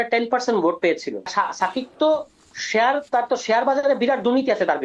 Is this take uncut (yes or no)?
no